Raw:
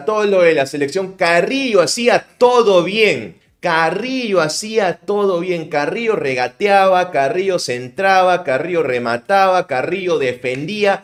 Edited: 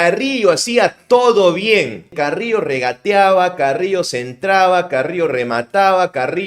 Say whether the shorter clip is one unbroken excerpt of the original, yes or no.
no